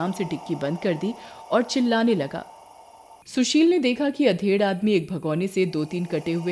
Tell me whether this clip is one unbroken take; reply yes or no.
no